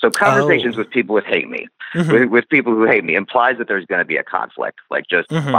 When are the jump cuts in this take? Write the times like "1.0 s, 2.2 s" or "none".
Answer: none